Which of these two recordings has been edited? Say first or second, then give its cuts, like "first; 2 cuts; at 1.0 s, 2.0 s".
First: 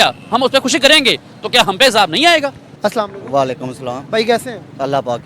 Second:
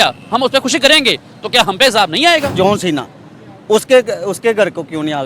second; 1 cut; at 2.5 s